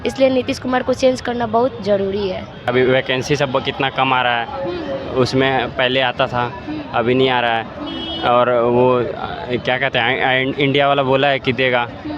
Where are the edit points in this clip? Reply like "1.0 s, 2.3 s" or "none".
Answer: 2.7 s